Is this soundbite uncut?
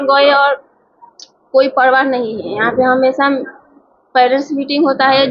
yes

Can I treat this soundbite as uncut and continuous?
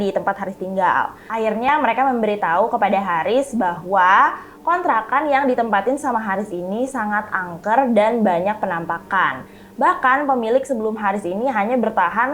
no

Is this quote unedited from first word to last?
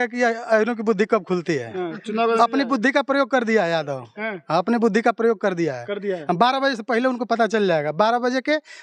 yes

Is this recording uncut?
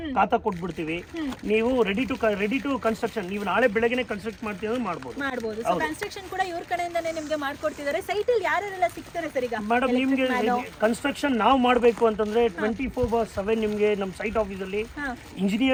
yes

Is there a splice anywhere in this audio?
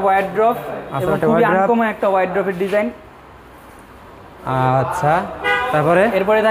no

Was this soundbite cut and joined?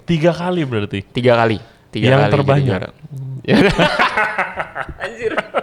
no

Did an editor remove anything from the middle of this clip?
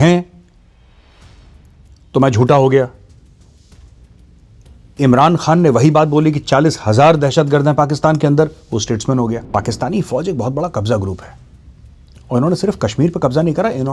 yes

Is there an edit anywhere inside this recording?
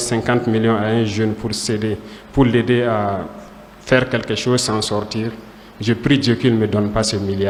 no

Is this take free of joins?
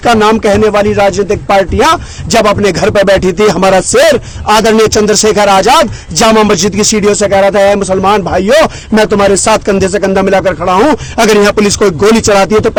yes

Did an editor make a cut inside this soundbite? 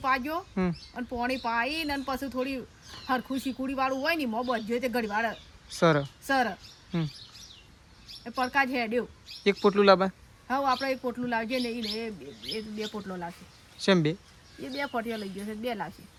no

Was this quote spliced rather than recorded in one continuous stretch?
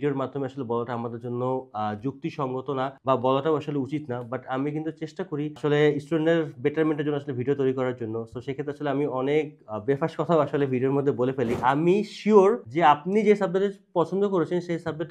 yes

